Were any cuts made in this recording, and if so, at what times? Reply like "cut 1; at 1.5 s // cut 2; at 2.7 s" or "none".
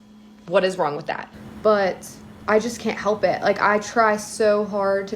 cut 1; at 1.2 s

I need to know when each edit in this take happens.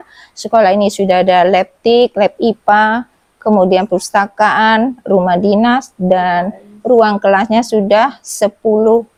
none

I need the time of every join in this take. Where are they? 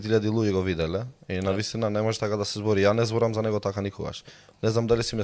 none

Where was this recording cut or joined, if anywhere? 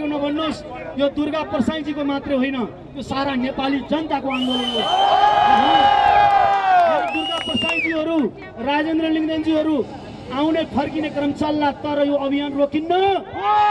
none

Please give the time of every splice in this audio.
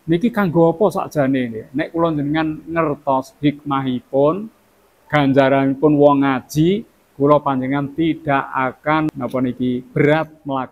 cut 1; at 9.1 s

